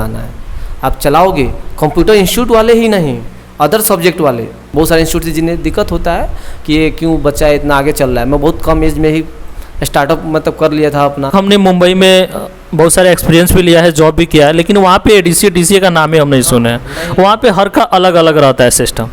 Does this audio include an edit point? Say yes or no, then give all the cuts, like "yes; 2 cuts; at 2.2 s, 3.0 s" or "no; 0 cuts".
yes; 2 cuts; at 4.5 s, 11.3 s